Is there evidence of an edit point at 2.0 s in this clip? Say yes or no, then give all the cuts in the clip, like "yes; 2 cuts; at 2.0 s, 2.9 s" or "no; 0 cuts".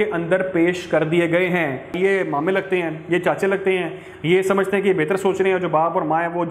yes; 1 cut; at 2.0 s